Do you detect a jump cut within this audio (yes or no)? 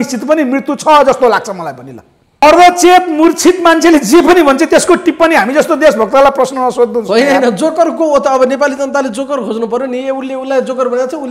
yes